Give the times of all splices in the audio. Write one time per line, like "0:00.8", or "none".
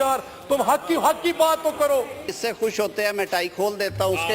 0:02.4